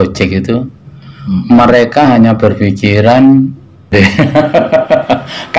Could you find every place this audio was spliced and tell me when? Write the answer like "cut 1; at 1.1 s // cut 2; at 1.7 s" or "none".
cut 1; at 3.9 s

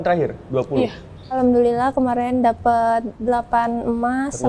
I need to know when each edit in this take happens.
cut 1; at 1.4 s // cut 2; at 3.1 s

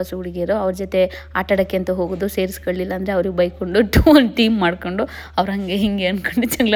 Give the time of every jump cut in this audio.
none

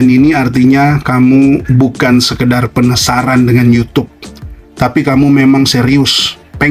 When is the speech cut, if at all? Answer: none

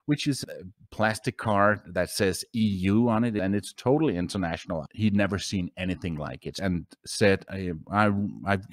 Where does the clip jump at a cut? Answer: cut 1; at 3.4 s // cut 2; at 4.8 s // cut 3; at 6.5 s

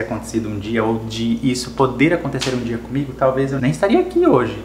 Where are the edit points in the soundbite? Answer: cut 1; at 3.6 s

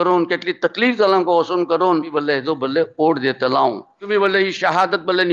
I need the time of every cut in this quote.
cut 1; at 2.1 s // cut 2; at 3.9 s

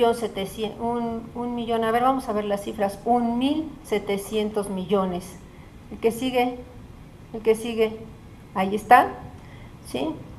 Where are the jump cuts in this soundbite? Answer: cut 1; at 4.7 s

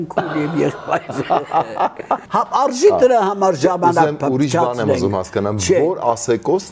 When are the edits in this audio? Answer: cut 1; at 2.2 s

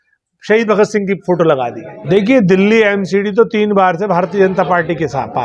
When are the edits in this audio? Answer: cut 1; at 2.0 s

